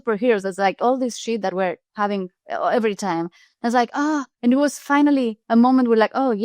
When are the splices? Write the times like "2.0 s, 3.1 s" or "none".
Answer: 1.8 s, 4.3 s, 5.4 s